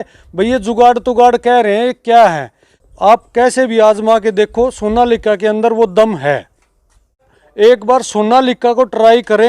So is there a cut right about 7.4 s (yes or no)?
yes